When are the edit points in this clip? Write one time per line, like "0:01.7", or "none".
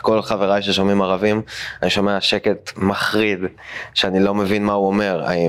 none